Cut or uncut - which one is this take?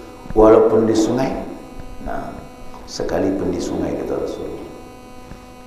uncut